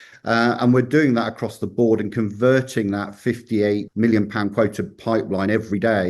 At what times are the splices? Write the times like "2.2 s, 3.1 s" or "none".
3.9 s